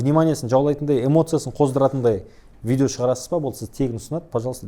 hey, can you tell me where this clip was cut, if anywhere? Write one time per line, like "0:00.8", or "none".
none

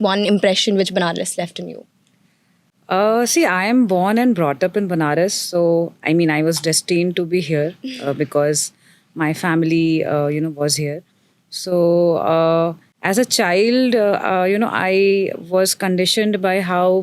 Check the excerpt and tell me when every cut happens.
none

